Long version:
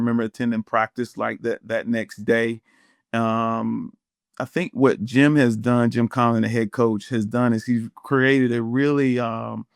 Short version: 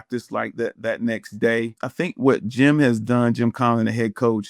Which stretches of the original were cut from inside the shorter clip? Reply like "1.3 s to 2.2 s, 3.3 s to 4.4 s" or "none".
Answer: 2.7 s to 4.4 s